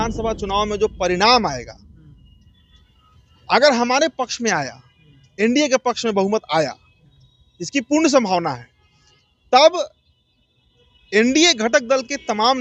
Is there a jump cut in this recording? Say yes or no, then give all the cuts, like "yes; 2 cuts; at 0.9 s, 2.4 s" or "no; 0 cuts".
no; 0 cuts